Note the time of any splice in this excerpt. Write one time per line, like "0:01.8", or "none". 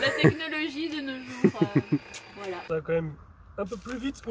0:02.6